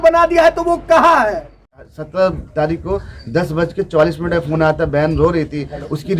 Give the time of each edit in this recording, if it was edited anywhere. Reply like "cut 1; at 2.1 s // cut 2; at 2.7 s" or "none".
cut 1; at 1.8 s